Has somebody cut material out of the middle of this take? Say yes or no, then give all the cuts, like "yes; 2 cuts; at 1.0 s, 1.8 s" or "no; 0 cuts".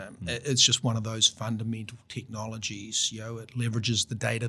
no; 0 cuts